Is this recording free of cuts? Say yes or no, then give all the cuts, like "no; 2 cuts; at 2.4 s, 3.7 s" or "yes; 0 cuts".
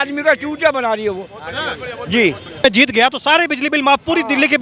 no; 1 cut; at 2.6 s